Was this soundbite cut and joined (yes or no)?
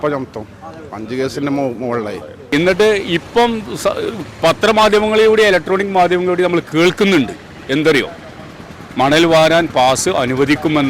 yes